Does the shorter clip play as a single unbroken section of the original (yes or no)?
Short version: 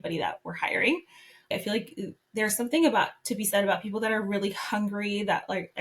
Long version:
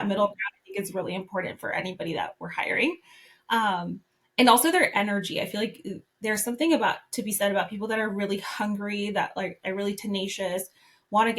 no